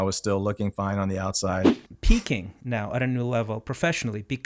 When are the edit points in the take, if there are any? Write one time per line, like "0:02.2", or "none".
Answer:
0:01.8